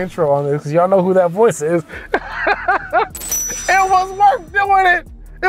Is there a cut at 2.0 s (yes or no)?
no